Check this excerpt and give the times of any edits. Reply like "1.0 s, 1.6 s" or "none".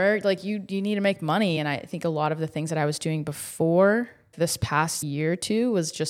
1.6 s, 4.7 s